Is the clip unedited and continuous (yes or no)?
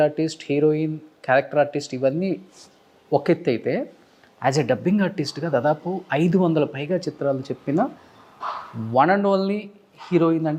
yes